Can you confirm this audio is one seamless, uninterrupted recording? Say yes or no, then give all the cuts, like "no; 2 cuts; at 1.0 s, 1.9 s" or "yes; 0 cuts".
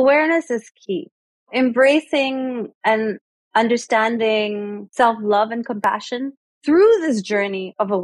no; 3 cuts; at 1.5 s, 2.7 s, 4.8 s